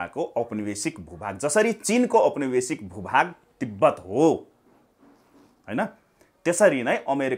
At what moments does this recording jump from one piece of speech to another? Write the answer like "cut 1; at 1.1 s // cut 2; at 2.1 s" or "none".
none

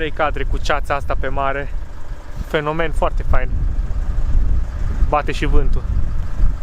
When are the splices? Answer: none

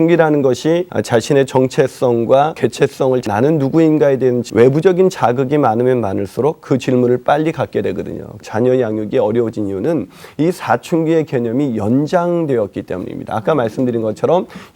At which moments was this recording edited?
cut 1; at 0.9 s // cut 2; at 2.9 s // cut 3; at 4.4 s // cut 4; at 8.4 s

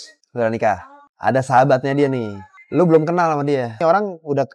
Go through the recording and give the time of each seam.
cut 1; at 1.0 s // cut 2; at 3.8 s

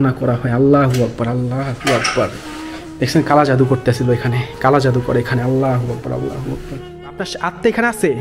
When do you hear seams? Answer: cut 1; at 7.3 s

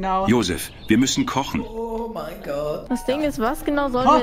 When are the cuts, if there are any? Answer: cut 1; at 2.8 s

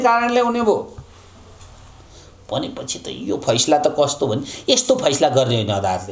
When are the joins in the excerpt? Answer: none

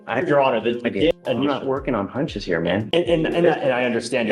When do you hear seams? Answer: cut 1; at 1.1 s

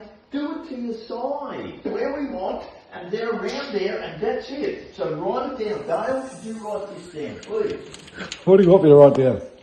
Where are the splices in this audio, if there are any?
cut 1; at 1.8 s

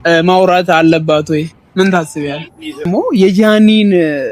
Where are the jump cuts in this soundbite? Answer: cut 1; at 2.9 s

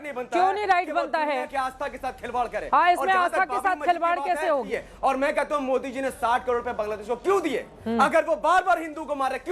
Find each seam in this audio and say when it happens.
cut 1; at 4.6 s

